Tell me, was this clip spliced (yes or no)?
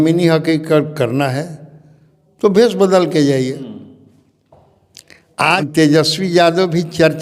yes